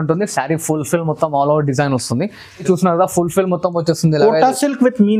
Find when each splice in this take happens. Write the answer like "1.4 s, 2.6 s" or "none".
2.6 s